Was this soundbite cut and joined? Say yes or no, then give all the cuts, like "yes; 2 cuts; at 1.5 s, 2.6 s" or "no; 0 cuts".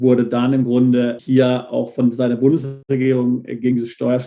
yes; 2 cuts; at 1.2 s, 2.7 s